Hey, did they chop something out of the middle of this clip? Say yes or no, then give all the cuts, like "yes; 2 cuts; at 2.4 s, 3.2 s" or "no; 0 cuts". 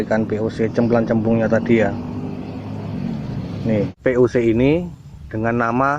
yes; 1 cut; at 3.9 s